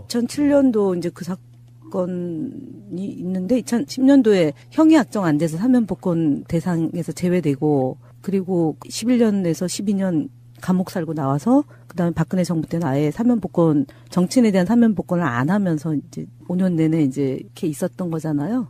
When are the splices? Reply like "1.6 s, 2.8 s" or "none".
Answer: 5.7 s